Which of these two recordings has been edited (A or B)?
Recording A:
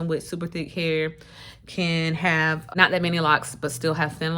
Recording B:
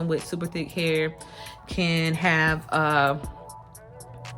A